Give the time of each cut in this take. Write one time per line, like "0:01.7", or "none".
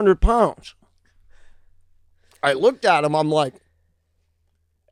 none